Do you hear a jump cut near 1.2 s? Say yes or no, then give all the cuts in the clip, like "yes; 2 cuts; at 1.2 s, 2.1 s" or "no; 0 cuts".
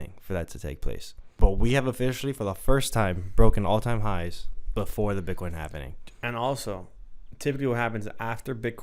yes; 1 cut; at 1.2 s